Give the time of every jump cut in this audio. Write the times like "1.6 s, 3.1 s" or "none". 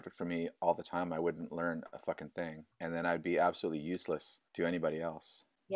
2.6 s, 4.4 s